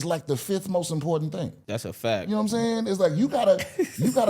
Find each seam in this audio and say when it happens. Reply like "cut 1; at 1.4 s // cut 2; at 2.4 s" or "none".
cut 1; at 1.6 s

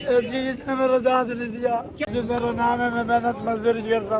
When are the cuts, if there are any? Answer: cut 1; at 2.1 s

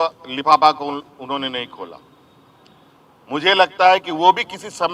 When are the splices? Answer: none

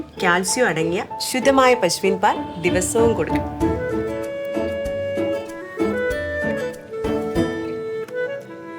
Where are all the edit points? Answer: none

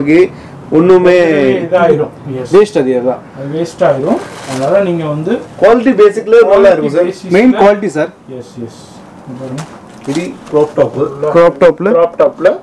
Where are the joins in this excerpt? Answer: none

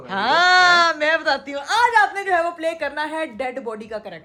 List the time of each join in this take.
none

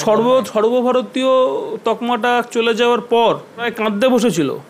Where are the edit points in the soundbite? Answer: cut 1; at 3.7 s

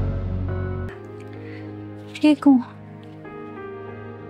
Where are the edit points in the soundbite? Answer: cut 1; at 1.0 s

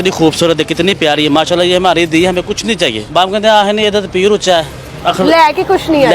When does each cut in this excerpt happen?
cut 1; at 3.0 s // cut 2; at 4.9 s

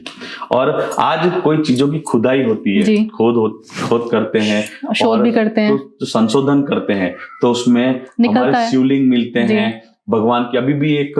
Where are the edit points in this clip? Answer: none

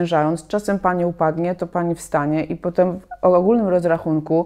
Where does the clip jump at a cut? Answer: none

